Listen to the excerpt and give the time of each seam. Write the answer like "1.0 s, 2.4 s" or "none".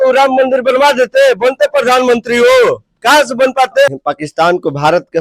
3.9 s